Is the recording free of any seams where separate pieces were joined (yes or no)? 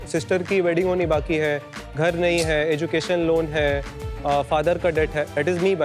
yes